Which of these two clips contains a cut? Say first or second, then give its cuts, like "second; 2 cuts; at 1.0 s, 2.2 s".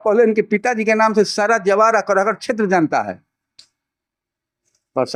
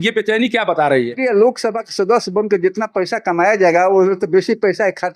second; 1 cut; at 1.1 s